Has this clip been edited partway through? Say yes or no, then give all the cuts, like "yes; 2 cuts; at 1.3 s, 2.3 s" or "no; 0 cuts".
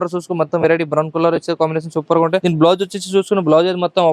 no; 0 cuts